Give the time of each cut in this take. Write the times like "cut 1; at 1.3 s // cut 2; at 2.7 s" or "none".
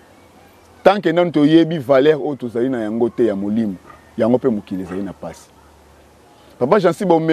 none